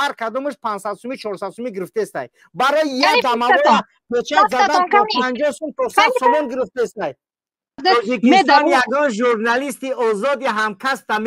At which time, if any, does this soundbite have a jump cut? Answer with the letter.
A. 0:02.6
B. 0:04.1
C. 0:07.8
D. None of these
C